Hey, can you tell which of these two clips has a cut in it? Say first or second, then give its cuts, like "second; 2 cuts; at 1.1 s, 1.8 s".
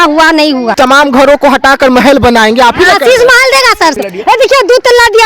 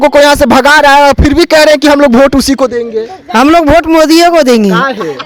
first; 2 cuts; at 0.7 s, 4.0 s